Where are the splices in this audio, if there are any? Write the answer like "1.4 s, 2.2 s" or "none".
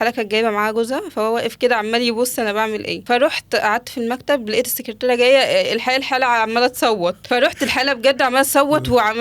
2.9 s, 7.2 s